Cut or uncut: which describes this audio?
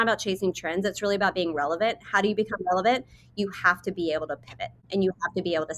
cut